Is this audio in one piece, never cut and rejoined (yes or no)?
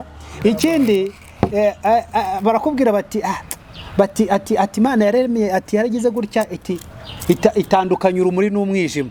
yes